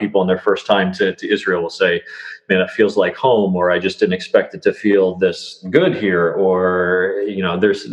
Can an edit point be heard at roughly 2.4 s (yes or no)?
no